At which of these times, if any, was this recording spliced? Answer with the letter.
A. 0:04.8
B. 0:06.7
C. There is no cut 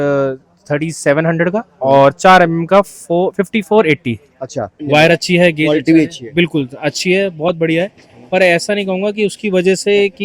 A